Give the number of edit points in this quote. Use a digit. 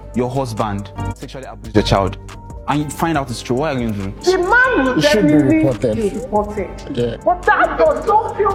0